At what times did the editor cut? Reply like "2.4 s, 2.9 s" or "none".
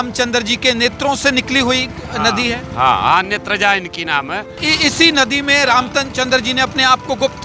4.6 s